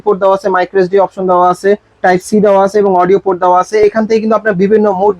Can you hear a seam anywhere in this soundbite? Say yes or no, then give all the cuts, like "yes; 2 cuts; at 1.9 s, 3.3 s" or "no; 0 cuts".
no; 0 cuts